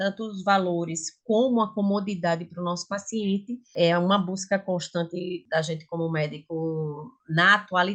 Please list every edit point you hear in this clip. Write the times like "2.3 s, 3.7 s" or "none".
none